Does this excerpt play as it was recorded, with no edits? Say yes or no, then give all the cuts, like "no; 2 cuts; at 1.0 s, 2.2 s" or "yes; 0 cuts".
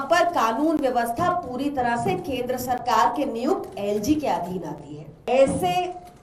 no; 1 cut; at 5.3 s